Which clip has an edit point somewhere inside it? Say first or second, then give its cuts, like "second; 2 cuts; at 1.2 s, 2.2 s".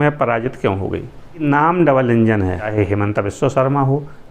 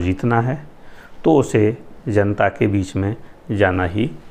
first; 2 cuts; at 1.4 s, 2.7 s